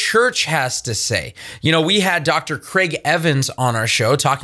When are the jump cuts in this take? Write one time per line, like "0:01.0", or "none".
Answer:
none